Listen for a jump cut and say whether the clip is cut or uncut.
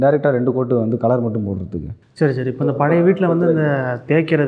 cut